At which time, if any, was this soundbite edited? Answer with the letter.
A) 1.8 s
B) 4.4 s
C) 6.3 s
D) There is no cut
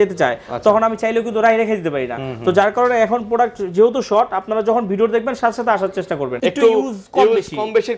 C